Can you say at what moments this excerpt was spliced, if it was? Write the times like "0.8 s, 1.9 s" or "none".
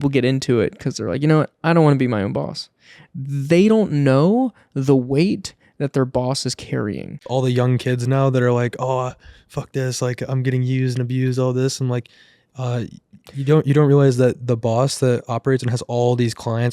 7.2 s